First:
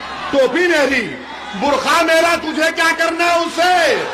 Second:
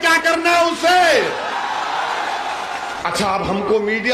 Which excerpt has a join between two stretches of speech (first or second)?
second